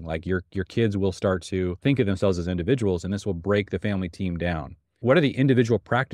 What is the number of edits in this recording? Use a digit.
2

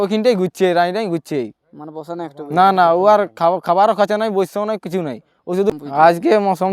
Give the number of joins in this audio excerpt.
1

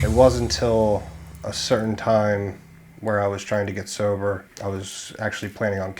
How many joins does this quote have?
1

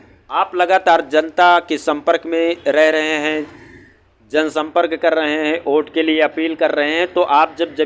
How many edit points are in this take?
0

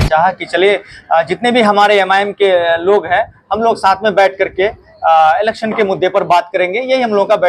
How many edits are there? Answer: 0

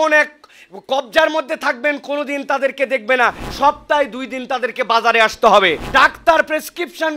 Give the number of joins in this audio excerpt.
2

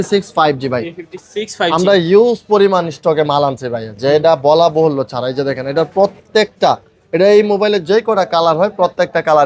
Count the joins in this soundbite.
0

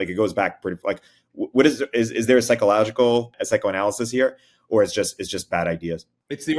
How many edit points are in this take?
1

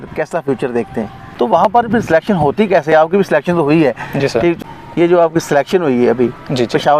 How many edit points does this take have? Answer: 2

